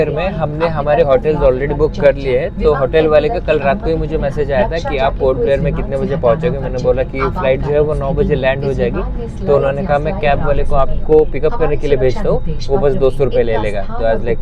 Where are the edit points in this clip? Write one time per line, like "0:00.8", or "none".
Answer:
none